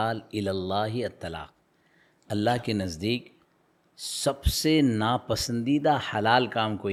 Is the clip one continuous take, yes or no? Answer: yes